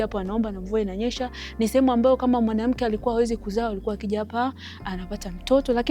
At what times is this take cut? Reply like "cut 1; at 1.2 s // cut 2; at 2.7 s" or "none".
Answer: none